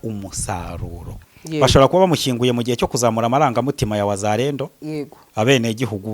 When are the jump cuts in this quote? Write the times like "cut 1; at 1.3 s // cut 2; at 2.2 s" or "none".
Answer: cut 1; at 1.3 s